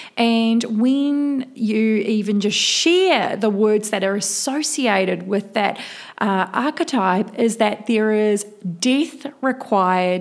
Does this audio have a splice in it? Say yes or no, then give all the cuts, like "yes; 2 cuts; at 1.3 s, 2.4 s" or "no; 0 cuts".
no; 0 cuts